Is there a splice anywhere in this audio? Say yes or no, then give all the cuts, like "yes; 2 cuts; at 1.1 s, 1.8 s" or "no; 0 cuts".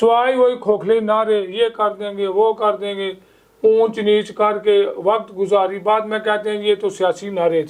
no; 0 cuts